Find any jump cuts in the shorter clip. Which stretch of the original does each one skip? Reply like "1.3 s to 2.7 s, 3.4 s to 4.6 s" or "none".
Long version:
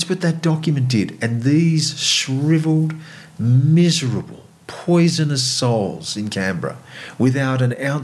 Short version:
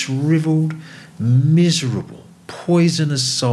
none

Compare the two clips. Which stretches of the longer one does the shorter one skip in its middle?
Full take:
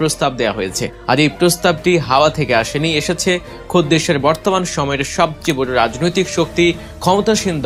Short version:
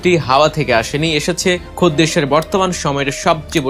3.5 s to 3.6 s

